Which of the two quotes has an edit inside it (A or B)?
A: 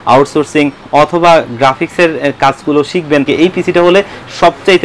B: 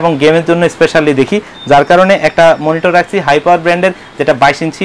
A